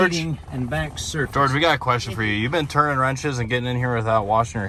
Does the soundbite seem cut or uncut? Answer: uncut